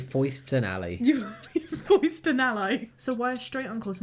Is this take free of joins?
no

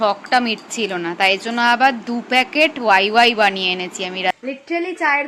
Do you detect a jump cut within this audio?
yes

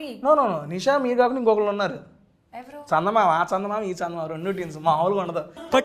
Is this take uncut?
yes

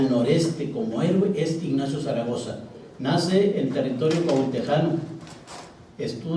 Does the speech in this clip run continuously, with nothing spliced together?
yes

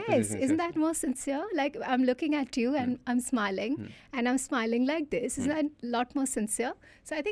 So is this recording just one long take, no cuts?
yes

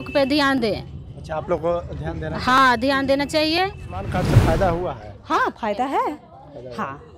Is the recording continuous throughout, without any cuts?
no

